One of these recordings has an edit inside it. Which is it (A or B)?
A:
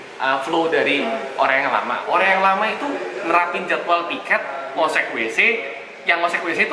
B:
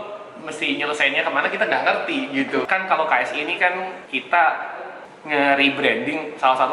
B